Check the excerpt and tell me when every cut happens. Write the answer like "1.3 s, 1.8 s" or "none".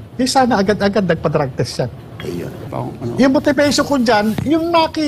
2.6 s